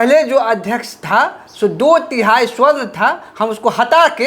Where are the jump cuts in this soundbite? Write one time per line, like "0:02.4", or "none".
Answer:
none